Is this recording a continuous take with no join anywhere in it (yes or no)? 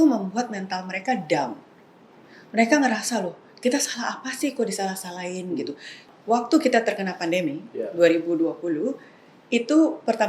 no